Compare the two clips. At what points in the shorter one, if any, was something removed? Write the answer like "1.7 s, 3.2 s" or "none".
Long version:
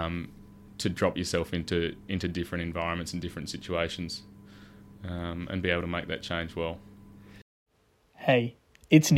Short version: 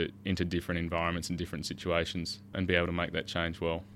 2.5 s